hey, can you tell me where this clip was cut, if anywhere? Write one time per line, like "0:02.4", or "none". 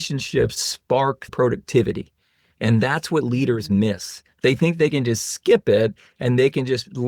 0:01.0